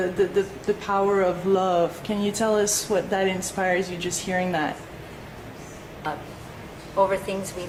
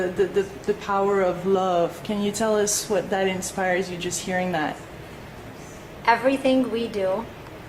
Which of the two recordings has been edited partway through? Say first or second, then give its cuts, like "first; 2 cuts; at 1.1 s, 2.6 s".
second; 1 cut; at 6.0 s